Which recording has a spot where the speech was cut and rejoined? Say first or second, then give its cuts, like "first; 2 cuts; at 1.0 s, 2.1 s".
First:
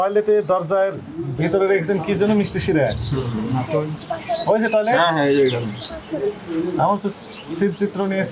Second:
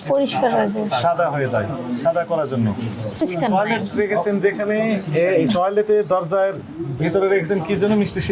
second; 1 cut; at 3.2 s